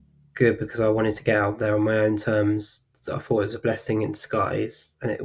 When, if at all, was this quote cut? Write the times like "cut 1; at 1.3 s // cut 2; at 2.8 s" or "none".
none